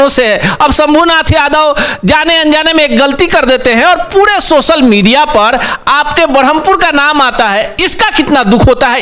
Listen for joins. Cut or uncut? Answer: uncut